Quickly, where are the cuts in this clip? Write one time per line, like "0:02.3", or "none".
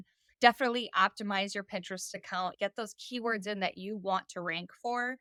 none